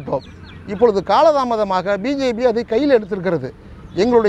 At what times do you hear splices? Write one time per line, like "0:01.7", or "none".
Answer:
none